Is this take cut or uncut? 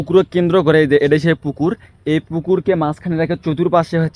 uncut